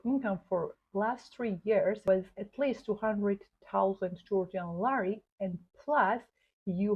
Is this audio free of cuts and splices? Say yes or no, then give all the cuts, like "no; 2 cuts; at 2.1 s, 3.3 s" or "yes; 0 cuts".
no; 1 cut; at 2.1 s